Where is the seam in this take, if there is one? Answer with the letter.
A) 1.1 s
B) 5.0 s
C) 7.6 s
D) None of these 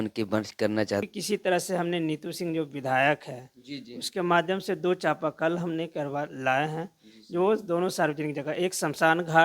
A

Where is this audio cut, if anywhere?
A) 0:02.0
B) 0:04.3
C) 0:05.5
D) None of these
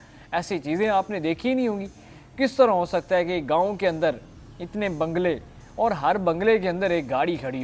D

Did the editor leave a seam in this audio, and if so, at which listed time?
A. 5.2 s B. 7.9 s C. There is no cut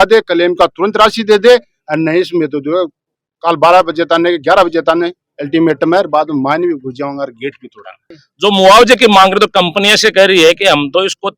B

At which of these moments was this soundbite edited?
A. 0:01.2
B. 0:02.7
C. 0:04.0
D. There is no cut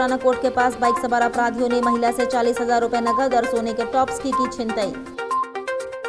D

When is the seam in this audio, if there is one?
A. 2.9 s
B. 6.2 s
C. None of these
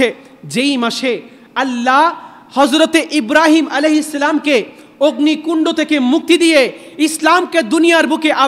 B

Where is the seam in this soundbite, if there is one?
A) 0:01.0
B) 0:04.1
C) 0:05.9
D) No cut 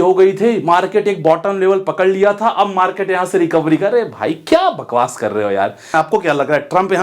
C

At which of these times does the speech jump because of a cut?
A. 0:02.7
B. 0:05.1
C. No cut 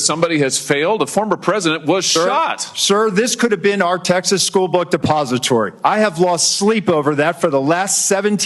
A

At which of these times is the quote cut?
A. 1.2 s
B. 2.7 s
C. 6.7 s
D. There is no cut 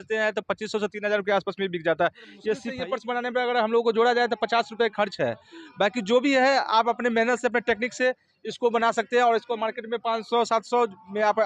B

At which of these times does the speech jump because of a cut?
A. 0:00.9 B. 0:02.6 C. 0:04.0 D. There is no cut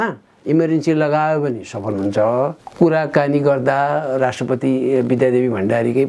B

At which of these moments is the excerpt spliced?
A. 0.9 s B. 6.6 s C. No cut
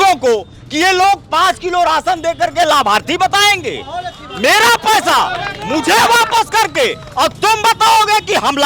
C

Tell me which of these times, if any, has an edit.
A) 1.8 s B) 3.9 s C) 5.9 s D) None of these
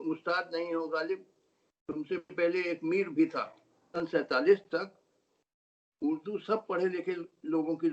B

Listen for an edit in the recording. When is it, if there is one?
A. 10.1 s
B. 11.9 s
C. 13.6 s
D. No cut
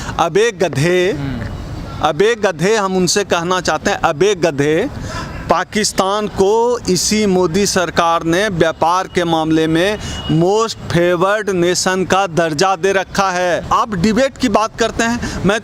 C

